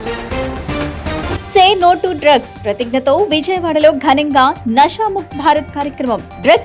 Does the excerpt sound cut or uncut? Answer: cut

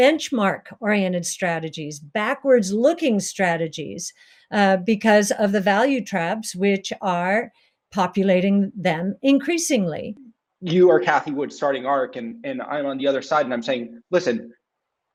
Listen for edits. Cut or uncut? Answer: uncut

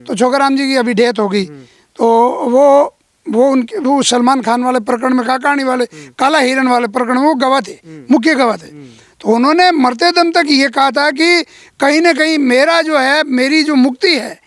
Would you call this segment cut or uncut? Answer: uncut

